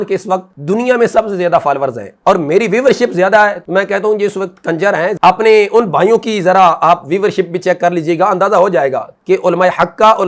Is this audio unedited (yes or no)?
no